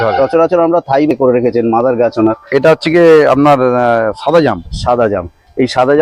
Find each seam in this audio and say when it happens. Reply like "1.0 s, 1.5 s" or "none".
1.1 s